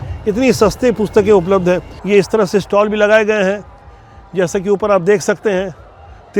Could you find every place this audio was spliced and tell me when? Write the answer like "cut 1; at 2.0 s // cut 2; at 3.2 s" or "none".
cut 1; at 1.9 s